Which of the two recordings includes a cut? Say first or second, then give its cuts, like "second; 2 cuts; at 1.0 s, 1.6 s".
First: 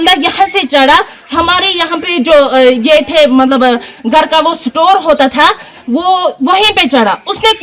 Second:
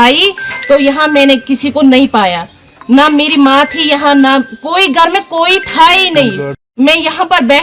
second; 1 cut; at 6.6 s